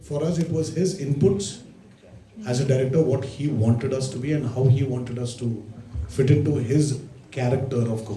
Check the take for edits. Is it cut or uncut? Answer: uncut